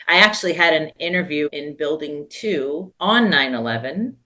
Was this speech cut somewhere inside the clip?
yes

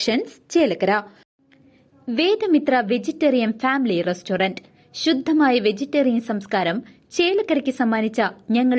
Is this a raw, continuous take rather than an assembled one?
no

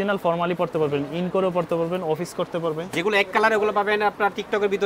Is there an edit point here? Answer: no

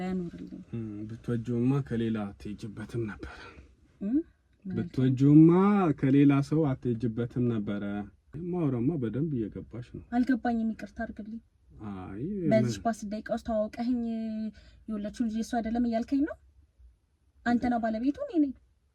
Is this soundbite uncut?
no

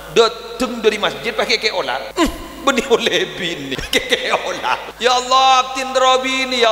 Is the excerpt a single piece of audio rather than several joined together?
no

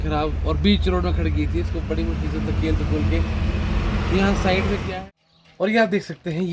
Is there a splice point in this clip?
yes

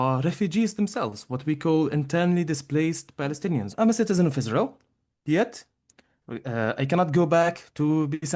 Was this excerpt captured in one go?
no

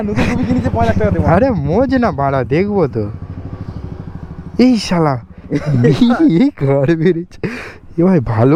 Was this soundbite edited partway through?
no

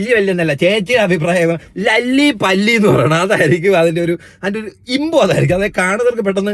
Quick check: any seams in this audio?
no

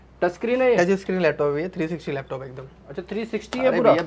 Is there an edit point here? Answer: no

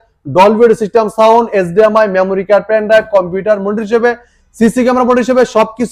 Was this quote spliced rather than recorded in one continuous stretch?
no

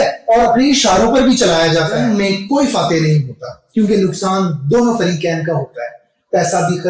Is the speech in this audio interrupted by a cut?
yes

